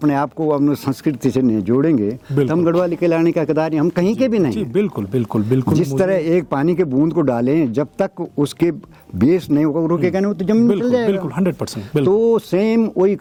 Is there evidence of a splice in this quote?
no; 0 cuts

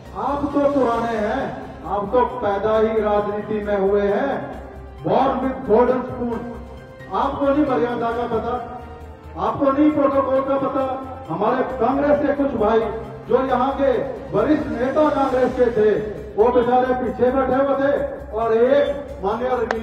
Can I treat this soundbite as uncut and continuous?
yes; 0 cuts

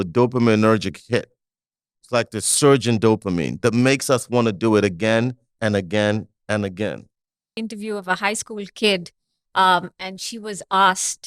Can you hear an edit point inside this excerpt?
yes; 1 cut; at 7.4 s

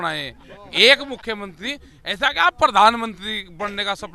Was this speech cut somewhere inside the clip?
no; 0 cuts

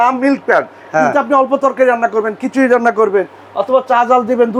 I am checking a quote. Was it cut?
no; 0 cuts

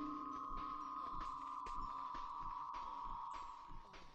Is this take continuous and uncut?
yes; 0 cuts

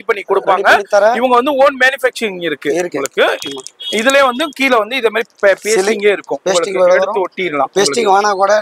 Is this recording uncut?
yes; 0 cuts

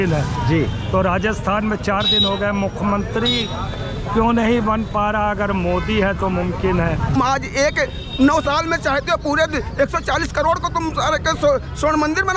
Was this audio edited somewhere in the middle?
yes; 1 cut; at 7.1 s

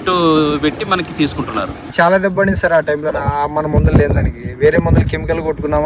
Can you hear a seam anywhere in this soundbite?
yes; 1 cut; at 1.9 s

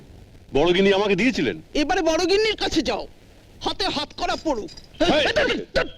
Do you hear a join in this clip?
yes; 1 cut; at 4.8 s

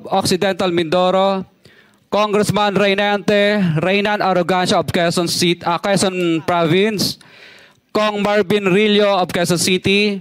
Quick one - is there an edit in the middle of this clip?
no; 0 cuts

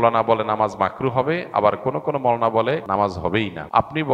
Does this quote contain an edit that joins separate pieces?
yes; 1 cut; at 3.0 s

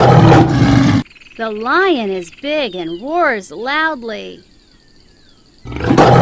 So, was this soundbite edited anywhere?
yes; 1 cut; at 1.1 s

